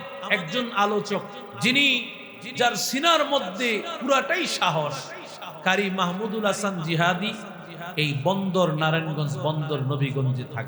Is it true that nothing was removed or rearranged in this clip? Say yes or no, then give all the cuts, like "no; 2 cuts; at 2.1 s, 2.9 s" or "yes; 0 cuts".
no; 1 cut; at 1.5 s